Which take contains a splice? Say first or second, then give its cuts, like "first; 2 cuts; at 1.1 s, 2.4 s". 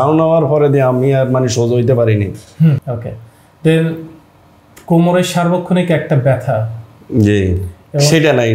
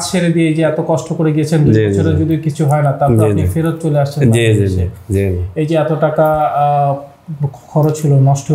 first; 1 cut; at 2.8 s